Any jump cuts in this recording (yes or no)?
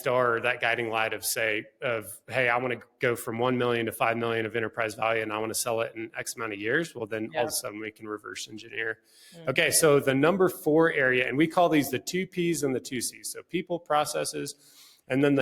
no